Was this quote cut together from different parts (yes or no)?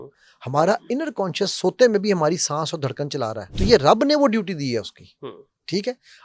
yes